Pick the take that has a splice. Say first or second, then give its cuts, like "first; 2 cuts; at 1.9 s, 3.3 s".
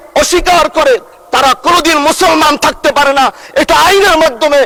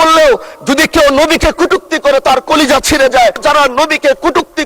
second; 1 cut; at 3.4 s